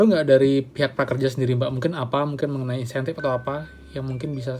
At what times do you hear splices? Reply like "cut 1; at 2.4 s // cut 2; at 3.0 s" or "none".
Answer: none